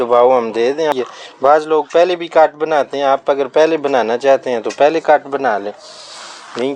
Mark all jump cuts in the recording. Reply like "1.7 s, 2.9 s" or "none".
0.9 s